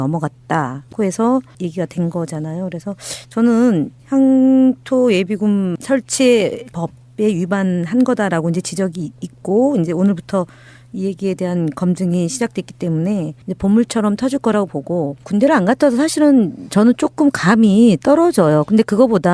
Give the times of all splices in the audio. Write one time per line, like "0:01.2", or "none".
0:02.1